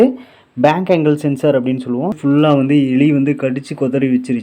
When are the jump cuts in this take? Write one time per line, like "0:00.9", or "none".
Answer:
0:02.2